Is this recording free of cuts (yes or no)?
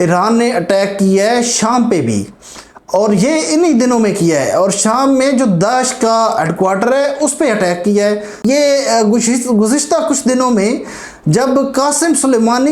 no